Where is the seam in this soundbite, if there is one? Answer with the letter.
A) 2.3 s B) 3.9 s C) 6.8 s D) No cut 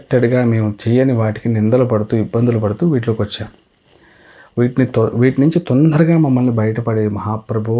D